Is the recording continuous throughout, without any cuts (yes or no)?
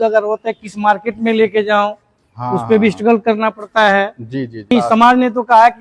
no